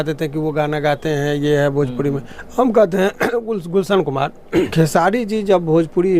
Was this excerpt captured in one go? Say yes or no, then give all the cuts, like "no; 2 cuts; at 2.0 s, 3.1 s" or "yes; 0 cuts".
no; 1 cut; at 4.7 s